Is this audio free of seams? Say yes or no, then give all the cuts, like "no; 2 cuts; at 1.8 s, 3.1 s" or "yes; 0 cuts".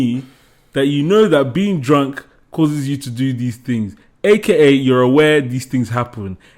yes; 0 cuts